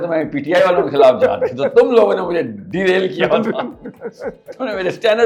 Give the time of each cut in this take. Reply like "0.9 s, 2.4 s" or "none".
none